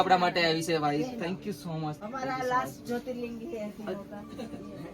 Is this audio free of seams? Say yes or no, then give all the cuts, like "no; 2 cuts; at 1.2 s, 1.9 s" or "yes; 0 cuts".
no; 1 cut; at 2.0 s